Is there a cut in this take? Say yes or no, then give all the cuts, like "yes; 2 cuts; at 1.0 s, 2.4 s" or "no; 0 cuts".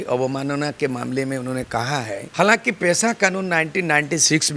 yes; 1 cut; at 2.2 s